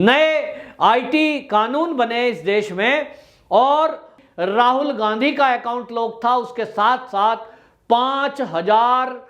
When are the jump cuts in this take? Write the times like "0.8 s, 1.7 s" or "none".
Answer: 4.1 s